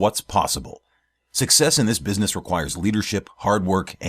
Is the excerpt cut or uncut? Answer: uncut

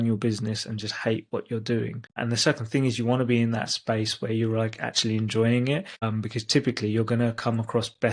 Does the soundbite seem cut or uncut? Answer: cut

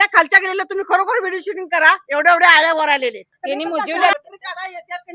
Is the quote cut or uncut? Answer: cut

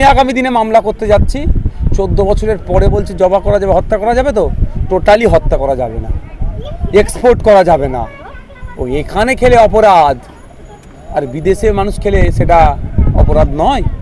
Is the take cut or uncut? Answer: uncut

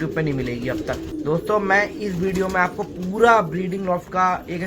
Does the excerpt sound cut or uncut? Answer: cut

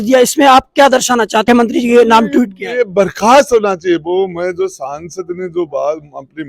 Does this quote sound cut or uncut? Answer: cut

